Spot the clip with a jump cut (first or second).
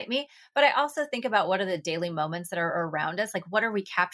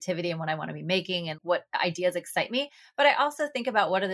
second